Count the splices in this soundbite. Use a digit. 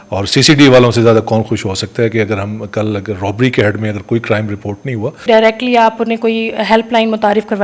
1